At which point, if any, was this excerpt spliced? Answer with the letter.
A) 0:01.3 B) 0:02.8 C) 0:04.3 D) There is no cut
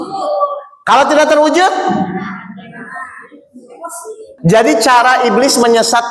C